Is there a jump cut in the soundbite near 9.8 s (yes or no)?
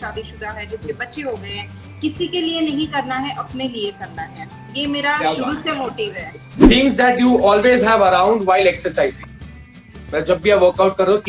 no